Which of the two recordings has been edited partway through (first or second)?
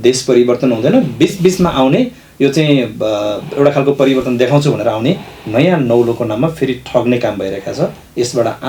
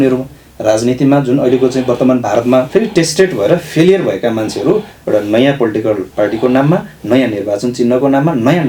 second